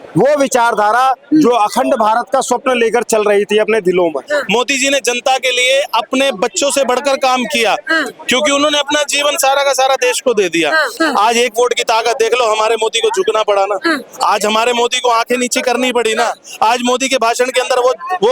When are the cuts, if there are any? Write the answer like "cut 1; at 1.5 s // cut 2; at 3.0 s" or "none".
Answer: cut 1; at 4.3 s // cut 2; at 10.9 s